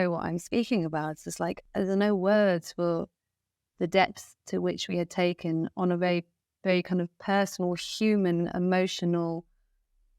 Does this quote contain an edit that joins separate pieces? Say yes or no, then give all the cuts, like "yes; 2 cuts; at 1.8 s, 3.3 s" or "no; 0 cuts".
yes; 1 cut; at 1.6 s